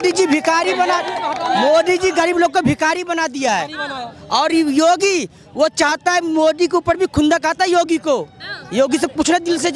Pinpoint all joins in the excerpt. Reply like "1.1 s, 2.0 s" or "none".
none